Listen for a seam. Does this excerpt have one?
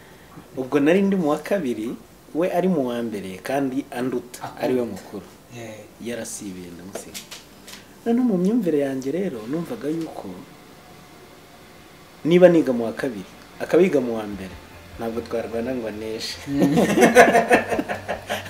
no; 0 cuts

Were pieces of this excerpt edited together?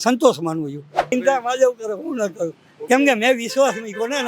yes; 1 cut; at 1.1 s

